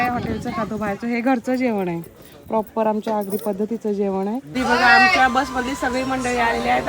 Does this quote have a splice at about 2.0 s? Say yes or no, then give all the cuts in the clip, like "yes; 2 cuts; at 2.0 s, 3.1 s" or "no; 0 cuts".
no; 1 cut; at 4.5 s